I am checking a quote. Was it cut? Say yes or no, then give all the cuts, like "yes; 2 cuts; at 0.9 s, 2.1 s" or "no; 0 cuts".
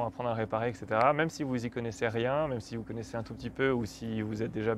no; 0 cuts